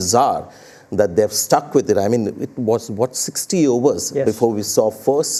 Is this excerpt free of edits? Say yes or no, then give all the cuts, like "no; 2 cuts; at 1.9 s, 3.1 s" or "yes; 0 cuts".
yes; 0 cuts